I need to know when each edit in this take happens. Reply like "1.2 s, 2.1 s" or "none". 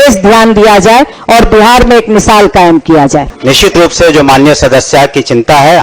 3.3 s